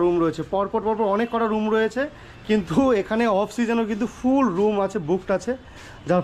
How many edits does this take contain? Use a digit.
0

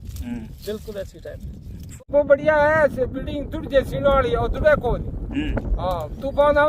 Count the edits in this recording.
1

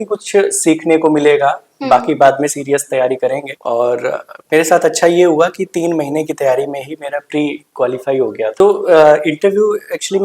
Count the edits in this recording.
1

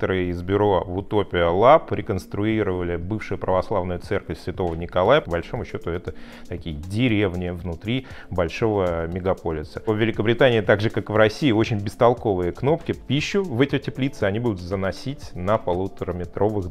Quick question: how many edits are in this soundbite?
3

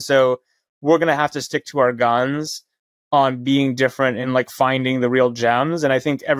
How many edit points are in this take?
1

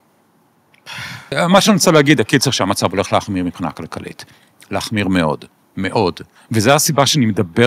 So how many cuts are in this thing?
2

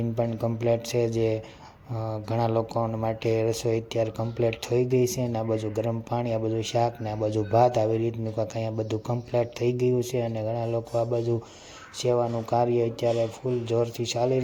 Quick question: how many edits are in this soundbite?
0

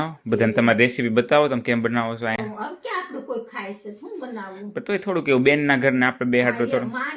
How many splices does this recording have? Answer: 0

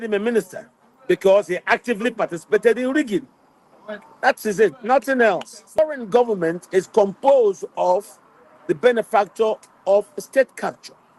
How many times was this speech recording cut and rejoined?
1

